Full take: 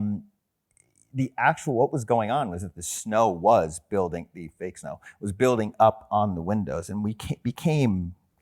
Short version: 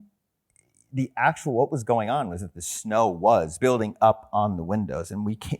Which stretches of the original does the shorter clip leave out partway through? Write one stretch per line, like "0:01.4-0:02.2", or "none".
0:03.7-0:05.3